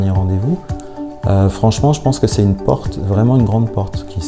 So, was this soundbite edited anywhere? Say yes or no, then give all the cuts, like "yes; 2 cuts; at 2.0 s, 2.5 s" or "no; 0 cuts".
no; 0 cuts